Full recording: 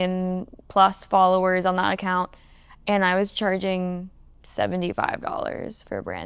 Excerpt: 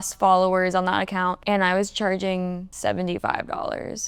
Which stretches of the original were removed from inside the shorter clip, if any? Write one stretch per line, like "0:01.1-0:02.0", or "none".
0:02.3-0:02.8
0:04.1-0:04.4